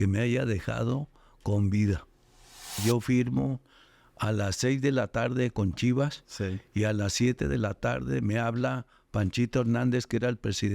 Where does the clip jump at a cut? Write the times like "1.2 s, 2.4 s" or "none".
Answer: 2.8 s